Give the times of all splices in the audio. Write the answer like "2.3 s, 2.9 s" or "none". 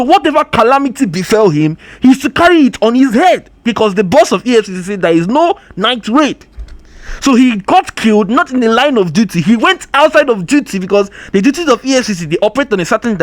none

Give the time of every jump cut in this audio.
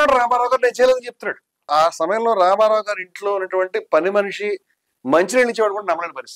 1.7 s

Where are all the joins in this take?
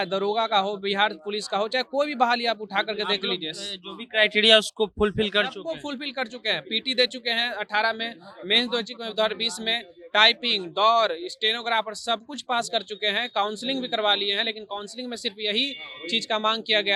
none

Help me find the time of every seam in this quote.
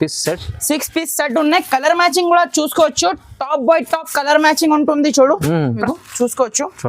5.8 s

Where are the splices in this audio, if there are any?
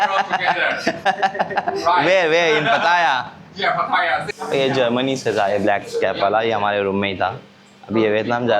4.3 s

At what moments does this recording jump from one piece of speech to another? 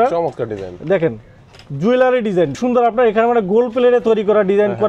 2.6 s

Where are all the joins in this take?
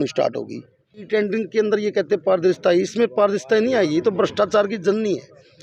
1.0 s

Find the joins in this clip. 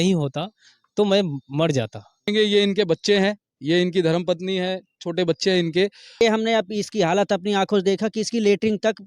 2.3 s, 6.2 s

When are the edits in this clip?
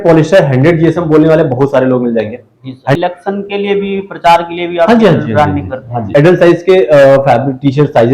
3.0 s, 6.1 s

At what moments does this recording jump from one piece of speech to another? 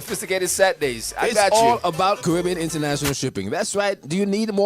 1.5 s

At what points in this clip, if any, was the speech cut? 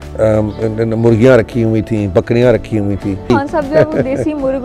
3.3 s

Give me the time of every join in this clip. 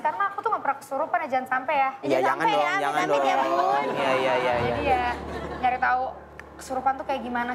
none

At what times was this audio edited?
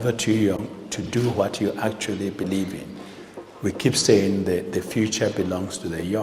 1.1 s

